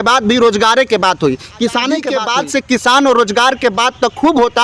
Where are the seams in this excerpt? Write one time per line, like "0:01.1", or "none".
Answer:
0:02.1